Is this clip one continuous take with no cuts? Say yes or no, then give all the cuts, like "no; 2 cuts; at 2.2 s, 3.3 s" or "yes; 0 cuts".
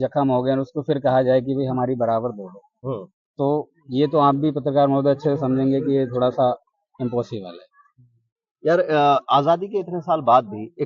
yes; 0 cuts